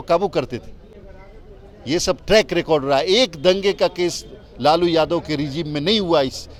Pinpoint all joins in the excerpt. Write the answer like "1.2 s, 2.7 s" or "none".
none